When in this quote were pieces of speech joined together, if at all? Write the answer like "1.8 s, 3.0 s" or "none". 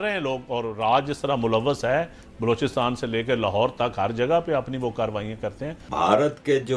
5.9 s